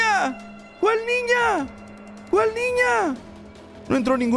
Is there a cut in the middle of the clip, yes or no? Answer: no